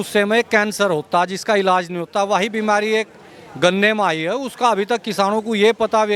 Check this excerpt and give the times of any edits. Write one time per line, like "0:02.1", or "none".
none